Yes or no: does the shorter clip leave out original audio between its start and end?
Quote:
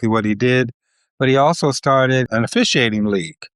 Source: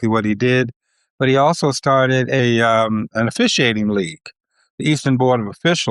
yes